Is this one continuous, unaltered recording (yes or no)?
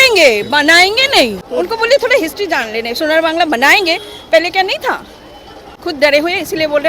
no